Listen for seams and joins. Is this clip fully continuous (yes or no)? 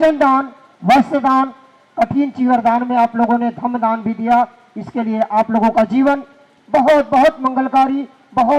yes